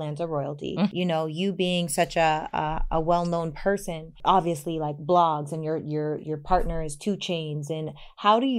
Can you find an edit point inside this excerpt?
yes; 2 cuts; at 0.9 s, 4.1 s

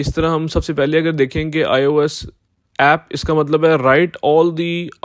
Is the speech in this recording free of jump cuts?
yes; 0 cuts

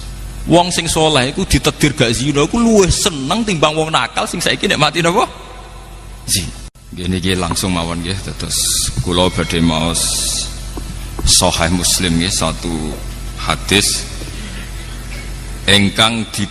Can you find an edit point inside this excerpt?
yes; 1 cut; at 6.8 s

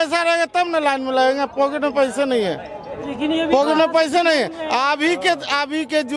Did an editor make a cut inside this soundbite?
no; 0 cuts

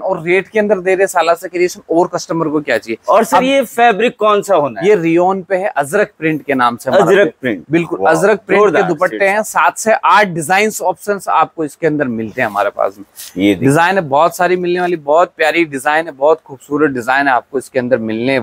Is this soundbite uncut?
yes; 0 cuts

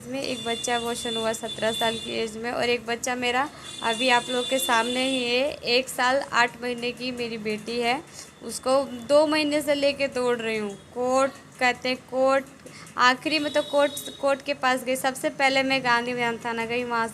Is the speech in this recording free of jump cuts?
yes; 0 cuts

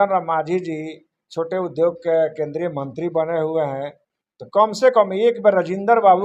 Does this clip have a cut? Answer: no; 0 cuts

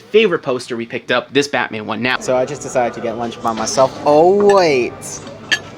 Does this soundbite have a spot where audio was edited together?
yes; 1 cut; at 2.2 s

